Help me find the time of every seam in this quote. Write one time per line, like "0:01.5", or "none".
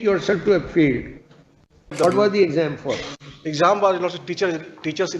0:01.9